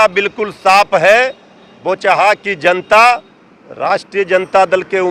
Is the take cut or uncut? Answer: uncut